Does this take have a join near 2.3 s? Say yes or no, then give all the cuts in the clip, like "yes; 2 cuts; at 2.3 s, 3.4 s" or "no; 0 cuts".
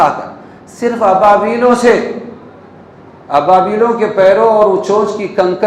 no; 0 cuts